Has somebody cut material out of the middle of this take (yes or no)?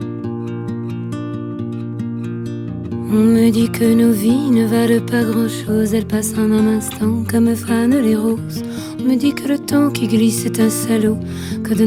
no